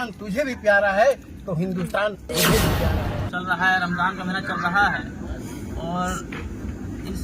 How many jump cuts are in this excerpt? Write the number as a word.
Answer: one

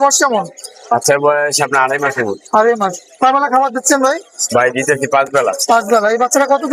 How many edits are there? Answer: zero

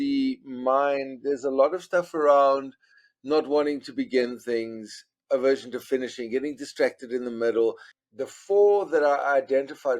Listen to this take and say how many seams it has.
one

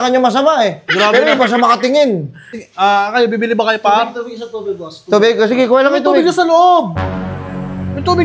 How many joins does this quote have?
one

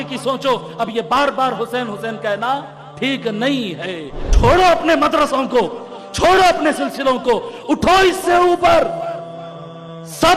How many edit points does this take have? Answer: one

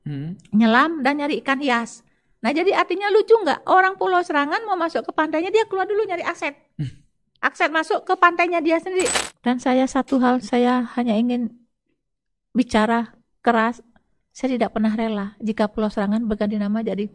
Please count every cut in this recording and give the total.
one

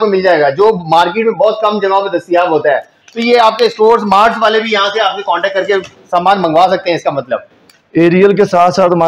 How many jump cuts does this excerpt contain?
zero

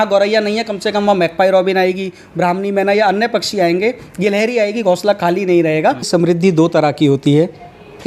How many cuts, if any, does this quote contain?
one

